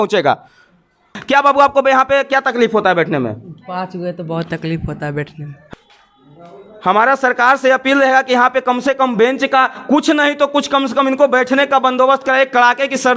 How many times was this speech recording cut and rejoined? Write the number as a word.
two